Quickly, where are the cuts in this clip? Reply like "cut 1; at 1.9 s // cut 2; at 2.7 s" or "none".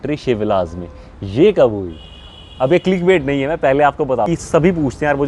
cut 1; at 4.3 s